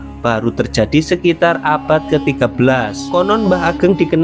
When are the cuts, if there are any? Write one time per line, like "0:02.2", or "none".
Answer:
0:03.0